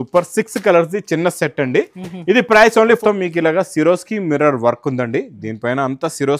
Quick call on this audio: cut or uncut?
cut